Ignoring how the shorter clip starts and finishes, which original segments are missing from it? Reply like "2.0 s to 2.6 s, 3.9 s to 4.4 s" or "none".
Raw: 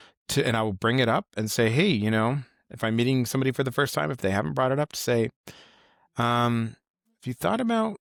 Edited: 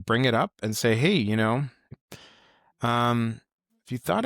2.7 s to 5.4 s